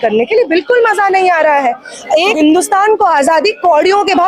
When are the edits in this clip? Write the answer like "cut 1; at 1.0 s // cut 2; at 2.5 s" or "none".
cut 1; at 2.3 s